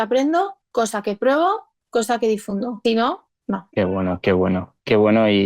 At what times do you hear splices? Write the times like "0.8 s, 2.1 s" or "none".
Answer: 2.7 s

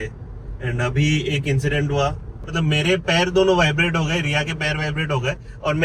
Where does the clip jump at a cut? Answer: 2.4 s

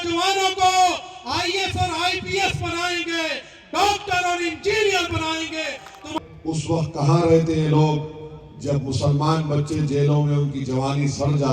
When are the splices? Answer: 6.1 s

